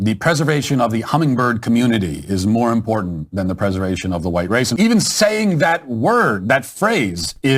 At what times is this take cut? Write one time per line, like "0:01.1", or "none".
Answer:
0:04.7